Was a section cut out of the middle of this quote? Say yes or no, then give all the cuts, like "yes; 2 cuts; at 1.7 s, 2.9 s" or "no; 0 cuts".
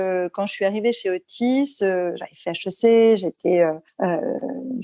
yes; 1 cut; at 3.9 s